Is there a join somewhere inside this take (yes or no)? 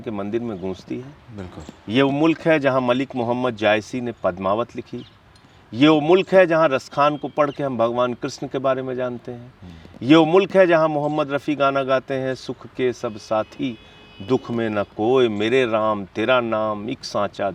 no